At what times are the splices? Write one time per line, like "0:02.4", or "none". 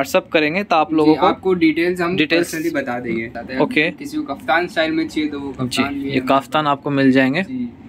0:03.3